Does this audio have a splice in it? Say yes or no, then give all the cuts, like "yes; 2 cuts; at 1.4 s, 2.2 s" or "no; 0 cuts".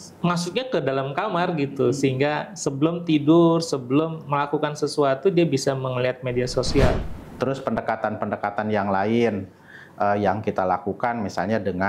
yes; 1 cut; at 7.1 s